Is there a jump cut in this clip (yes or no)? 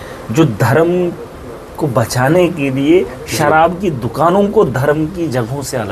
no